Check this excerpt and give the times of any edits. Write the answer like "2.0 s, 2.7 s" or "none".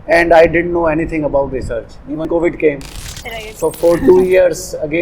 2.2 s